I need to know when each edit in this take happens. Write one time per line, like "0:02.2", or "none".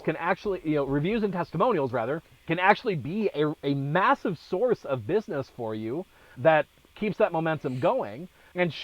0:07.0